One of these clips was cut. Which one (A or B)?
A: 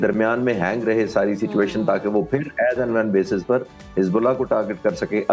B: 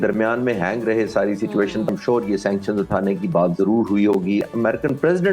B